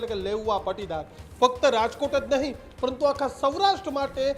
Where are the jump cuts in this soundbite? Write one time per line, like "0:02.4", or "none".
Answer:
none